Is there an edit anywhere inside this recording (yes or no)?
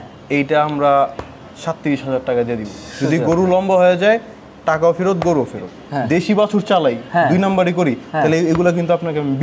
yes